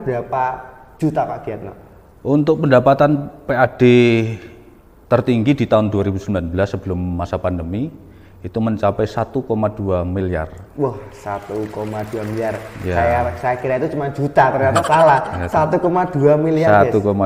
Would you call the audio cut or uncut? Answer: uncut